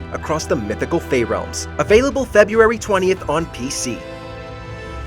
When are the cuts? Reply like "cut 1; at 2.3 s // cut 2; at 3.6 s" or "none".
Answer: cut 1; at 1.6 s // cut 2; at 4.0 s